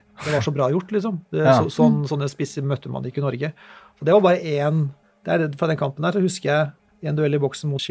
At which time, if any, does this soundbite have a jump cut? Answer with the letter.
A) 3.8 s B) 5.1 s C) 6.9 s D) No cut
C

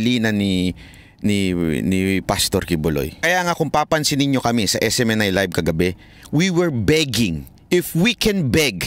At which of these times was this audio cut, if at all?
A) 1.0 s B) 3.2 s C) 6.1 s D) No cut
B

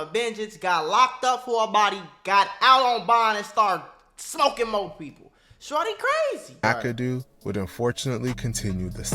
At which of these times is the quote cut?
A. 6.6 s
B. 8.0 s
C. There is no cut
A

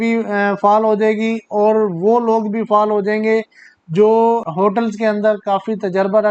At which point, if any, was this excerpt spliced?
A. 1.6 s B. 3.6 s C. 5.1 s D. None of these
D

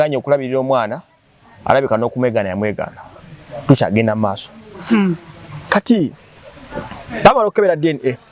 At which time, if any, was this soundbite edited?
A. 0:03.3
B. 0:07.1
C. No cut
C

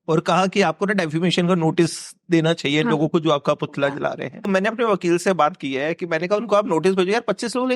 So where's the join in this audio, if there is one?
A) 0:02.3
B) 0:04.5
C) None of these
B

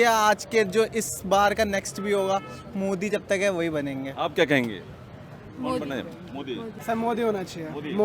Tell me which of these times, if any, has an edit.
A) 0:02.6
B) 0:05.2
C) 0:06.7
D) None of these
C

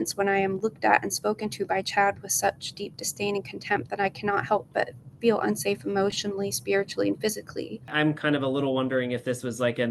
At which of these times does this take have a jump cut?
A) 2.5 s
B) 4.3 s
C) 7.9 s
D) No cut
C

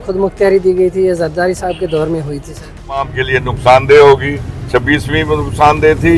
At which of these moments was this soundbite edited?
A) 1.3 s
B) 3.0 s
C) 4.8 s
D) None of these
B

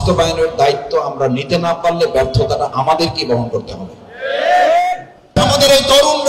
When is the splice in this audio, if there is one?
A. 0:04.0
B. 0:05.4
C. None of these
B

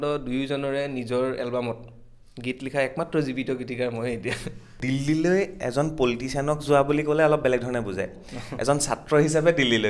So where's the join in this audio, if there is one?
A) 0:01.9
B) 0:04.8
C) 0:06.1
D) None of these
B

